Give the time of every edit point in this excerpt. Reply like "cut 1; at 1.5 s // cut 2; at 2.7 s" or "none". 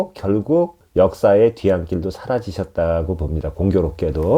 none

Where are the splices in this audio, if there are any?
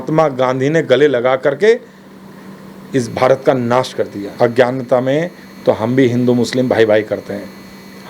cut 1; at 4.2 s

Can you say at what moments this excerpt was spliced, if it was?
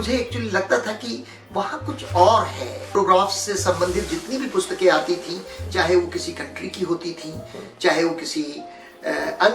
cut 1; at 2.9 s

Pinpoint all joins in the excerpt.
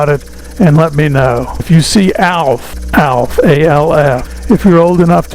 cut 1; at 1.6 s // cut 2; at 2.7 s // cut 3; at 4.3 s

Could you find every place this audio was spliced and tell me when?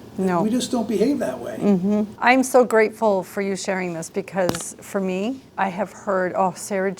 cut 1; at 2.1 s // cut 2; at 5.5 s

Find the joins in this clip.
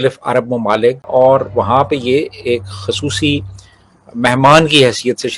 cut 1; at 1.0 s

